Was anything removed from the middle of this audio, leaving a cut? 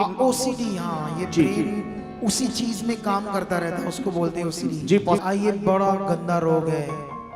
yes; 1 cut; at 5.2 s

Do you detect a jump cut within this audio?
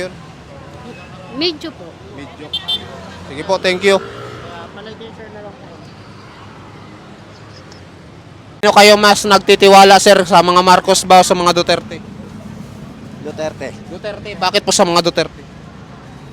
yes; 1 cut; at 8.6 s

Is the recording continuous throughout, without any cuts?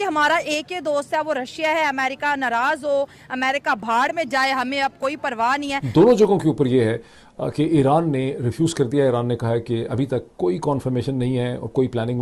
yes; 0 cuts

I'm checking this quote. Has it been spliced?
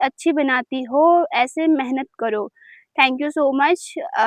no; 0 cuts

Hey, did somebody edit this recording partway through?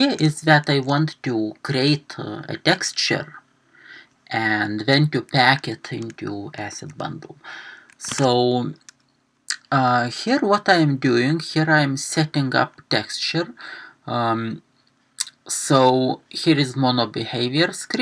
yes; 1 cut; at 6.5 s

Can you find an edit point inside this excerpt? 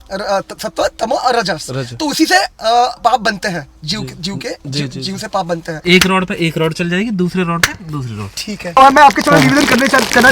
yes; 2 cuts; at 5.8 s, 8.8 s

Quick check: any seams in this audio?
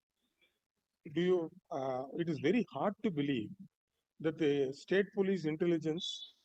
no; 0 cuts

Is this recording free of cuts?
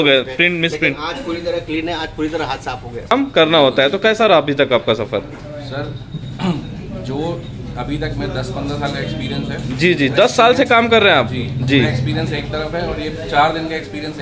no; 1 cut; at 3.1 s

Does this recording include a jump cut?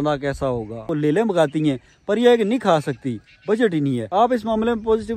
yes; 2 cuts; at 0.9 s, 4.0 s

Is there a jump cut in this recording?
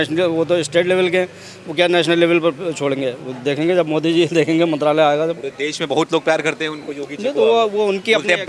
no; 0 cuts

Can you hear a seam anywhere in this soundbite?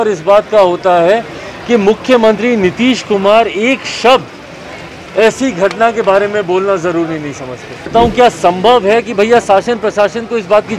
yes; 1 cut; at 7.9 s

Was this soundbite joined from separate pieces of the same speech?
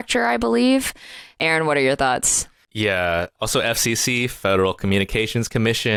no; 0 cuts

